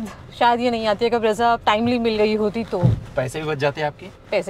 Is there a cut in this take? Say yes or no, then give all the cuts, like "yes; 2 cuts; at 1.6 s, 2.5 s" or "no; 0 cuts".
no; 0 cuts